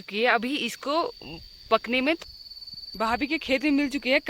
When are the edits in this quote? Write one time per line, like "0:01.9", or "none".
0:02.2